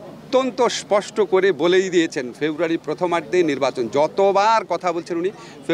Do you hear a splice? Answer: no; 0 cuts

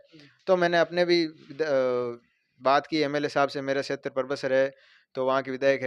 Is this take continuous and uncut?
yes; 0 cuts

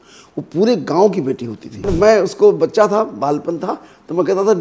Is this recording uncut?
no; 1 cut; at 1.8 s

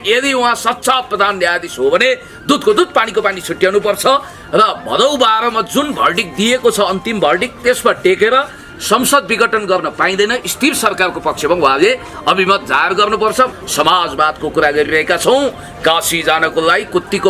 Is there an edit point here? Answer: yes; 1 cut; at 13.6 s

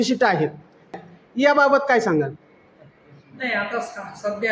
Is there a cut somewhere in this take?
yes; 1 cut; at 0.9 s

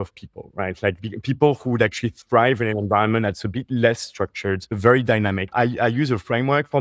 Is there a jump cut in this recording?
yes; 2 cuts; at 4.7 s, 5.5 s

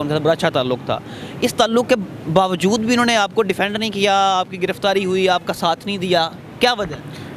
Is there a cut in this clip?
no; 0 cuts

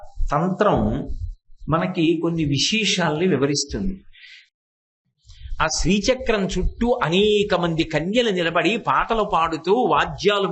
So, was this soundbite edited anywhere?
yes; 1 cut; at 4.8 s

